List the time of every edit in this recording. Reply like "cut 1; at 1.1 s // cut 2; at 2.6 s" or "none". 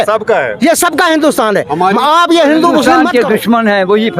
cut 1; at 3.0 s